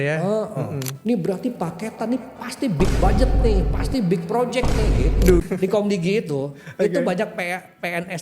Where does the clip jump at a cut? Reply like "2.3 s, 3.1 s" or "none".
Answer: 0.9 s, 5.4 s